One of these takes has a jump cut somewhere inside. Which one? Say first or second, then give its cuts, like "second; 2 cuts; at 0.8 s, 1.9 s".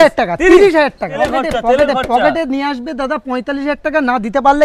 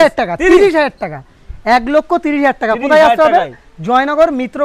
first; 1 cut; at 1.1 s